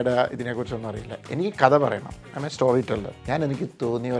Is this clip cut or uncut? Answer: cut